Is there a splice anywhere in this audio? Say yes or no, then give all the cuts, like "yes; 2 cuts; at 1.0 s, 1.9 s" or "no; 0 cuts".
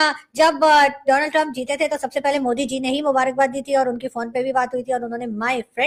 no; 0 cuts